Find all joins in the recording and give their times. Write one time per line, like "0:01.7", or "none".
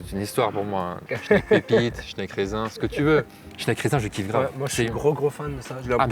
0:01.0
0:03.5